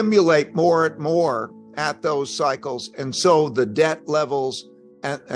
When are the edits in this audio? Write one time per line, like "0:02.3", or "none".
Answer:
none